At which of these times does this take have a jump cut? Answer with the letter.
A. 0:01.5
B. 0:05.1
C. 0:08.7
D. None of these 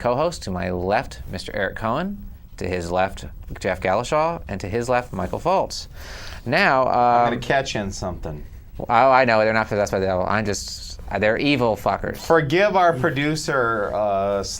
B